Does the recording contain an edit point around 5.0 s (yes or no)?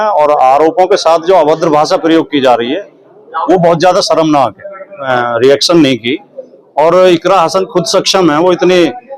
yes